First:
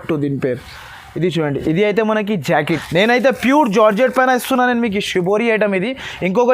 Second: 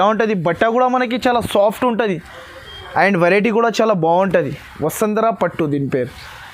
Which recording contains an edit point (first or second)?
first